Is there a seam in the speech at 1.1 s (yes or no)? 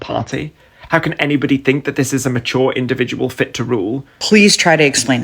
no